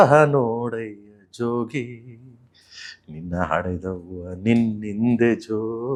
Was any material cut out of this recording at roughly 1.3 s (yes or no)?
no